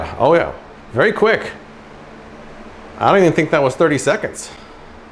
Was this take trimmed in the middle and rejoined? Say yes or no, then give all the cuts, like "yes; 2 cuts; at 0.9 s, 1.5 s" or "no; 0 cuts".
no; 0 cuts